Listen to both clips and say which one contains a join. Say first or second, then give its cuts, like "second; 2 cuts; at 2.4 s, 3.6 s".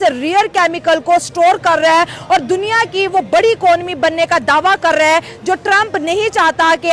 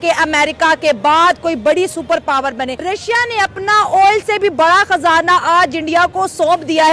second; 1 cut; at 2.8 s